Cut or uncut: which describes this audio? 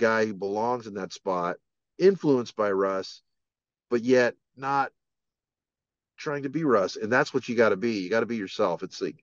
uncut